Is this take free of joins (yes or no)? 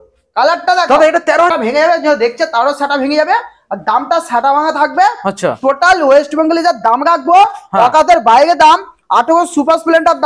no